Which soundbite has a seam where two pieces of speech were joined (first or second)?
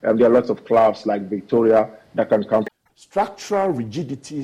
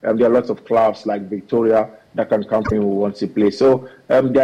second